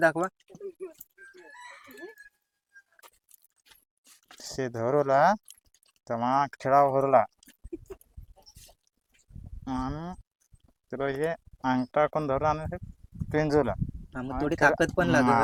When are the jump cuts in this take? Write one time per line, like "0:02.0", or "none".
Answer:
none